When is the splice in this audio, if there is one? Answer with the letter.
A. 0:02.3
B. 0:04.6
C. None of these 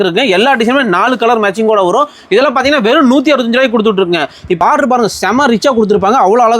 B